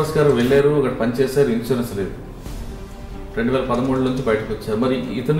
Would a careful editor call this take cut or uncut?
uncut